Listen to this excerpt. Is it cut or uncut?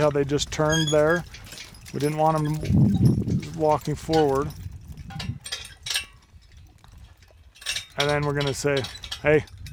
uncut